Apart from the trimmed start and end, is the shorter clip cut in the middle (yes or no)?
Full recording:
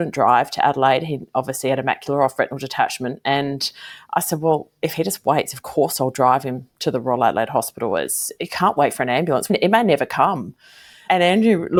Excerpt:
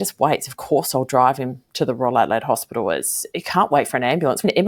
no